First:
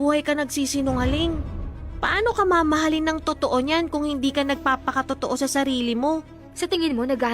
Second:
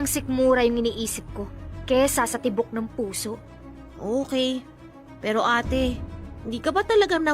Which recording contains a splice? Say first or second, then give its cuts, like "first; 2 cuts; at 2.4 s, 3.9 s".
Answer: first; 1 cut; at 6.4 s